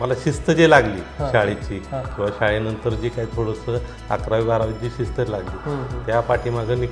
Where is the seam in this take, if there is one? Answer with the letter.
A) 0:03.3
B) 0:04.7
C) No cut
C